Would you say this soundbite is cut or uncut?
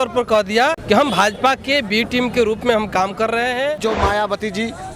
cut